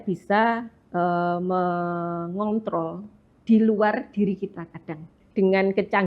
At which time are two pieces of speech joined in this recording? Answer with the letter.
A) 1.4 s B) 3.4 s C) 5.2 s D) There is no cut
C